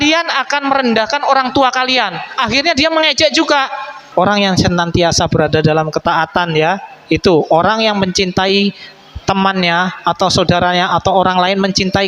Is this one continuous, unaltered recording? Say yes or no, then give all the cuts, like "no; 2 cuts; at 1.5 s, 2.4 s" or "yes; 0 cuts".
no; 1 cut; at 4.0 s